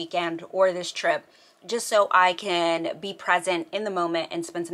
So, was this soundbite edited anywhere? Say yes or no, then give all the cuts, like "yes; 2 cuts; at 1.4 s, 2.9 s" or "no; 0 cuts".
no; 0 cuts